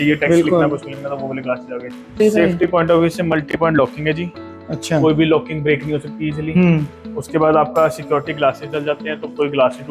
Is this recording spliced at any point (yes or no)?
yes